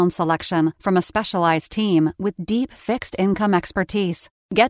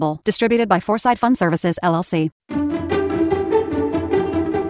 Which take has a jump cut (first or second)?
second